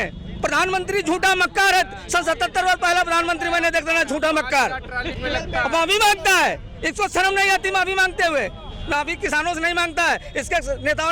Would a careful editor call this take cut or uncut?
uncut